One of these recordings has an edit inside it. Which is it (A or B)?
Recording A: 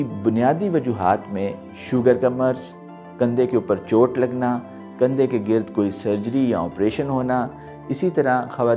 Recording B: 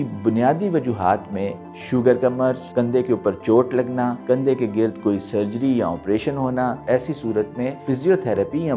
B